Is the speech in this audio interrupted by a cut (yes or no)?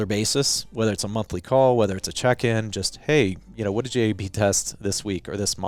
no